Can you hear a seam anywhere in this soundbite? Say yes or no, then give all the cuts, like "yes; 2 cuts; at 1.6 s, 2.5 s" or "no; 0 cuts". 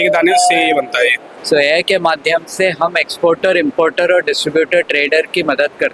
yes; 1 cut; at 1.4 s